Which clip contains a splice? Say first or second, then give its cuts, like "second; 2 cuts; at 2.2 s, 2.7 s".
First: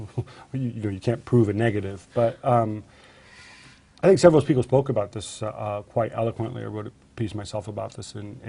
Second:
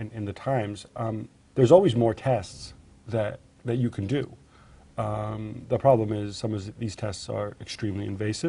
first; 1 cut; at 6.8 s